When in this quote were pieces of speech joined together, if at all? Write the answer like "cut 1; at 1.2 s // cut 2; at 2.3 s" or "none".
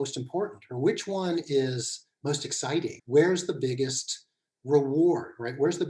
cut 1; at 3.0 s